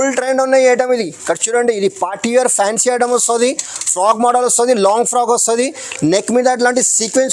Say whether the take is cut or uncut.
uncut